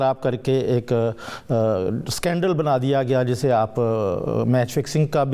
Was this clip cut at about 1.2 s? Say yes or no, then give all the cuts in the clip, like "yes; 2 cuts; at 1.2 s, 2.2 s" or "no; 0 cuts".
no; 0 cuts